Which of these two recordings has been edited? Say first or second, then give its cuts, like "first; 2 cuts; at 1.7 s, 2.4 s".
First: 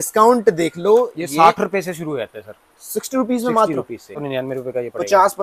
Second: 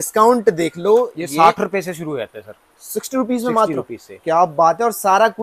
first; 1 cut; at 4.2 s